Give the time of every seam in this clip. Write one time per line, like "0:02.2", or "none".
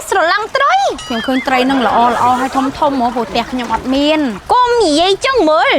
0:01.1
0:04.4